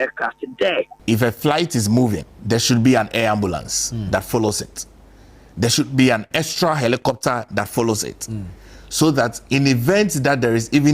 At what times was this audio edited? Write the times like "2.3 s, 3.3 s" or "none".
0.9 s, 2.3 s

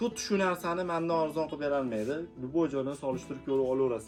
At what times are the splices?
none

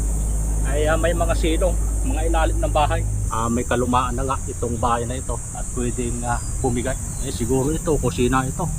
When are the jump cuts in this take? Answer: 3.2 s, 6.9 s

